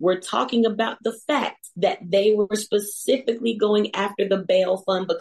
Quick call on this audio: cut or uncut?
cut